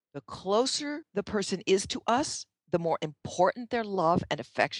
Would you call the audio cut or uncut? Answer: cut